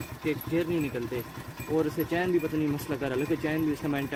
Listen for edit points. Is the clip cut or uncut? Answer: uncut